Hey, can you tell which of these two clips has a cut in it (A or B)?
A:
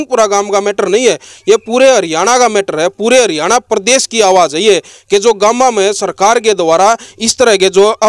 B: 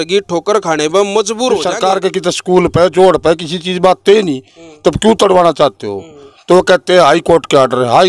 B